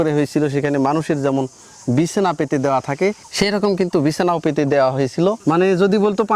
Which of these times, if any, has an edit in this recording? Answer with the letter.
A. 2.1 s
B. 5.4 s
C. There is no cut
B